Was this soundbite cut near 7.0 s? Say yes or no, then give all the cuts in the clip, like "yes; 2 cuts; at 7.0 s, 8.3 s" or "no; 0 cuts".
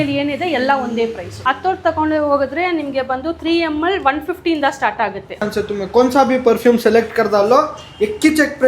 no; 2 cuts; at 1.3 s, 5.4 s